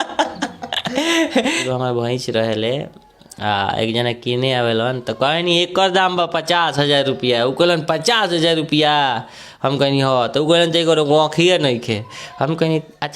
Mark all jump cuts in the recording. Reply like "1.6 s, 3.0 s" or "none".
1.6 s